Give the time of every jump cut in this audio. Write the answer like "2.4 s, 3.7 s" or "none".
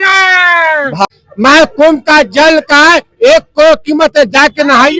1.1 s